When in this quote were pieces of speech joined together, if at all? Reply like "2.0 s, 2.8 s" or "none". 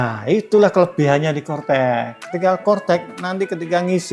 none